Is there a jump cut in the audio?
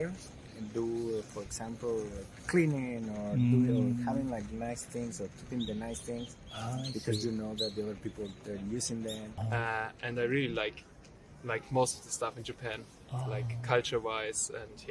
yes; 1 cut; at 9.4 s

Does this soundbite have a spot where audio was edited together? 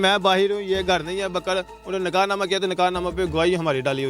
no; 0 cuts

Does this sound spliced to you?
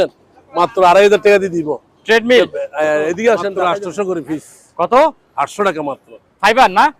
yes; 1 cut; at 3.6 s

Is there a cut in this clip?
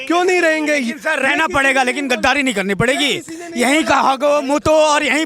no; 0 cuts

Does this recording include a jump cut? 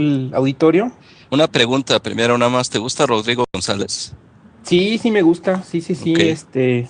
yes; 1 cut; at 5.2 s

